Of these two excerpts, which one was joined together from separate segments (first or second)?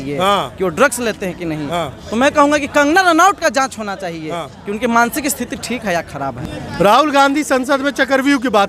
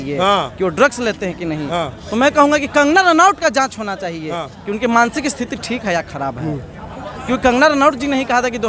first